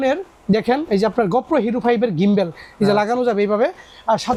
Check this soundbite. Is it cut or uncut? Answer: uncut